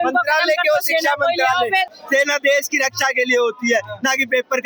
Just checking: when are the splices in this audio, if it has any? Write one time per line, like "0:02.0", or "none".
0:01.9